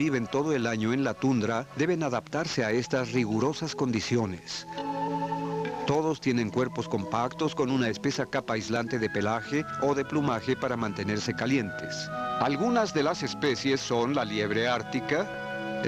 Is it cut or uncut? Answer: cut